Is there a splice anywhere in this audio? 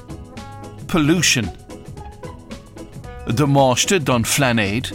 yes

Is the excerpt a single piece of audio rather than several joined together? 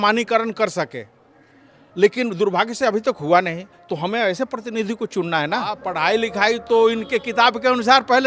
no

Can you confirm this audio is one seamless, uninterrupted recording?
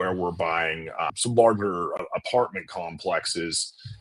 no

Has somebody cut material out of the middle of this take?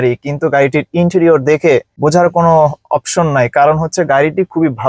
no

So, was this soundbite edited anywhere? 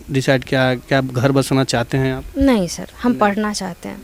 no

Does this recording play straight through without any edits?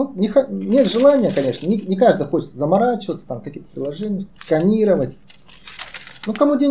no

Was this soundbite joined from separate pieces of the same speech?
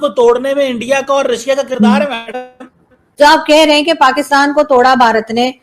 yes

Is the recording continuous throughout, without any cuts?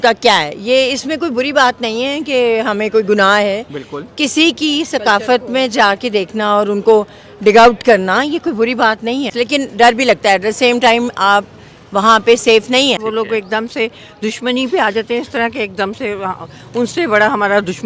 no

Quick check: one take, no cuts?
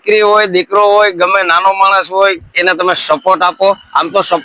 yes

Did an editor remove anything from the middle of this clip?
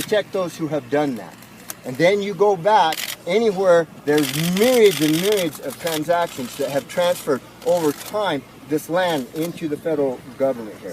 yes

